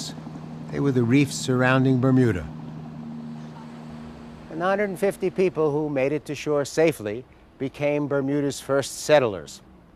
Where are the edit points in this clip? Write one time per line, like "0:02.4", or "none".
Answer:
none